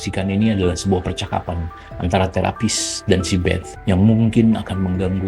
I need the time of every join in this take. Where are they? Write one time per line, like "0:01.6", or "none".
0:03.7